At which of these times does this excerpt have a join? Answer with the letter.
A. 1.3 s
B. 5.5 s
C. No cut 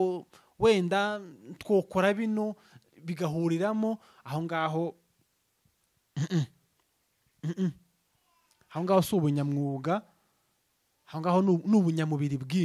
C